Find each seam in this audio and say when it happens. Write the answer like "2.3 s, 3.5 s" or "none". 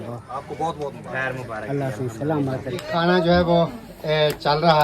2.7 s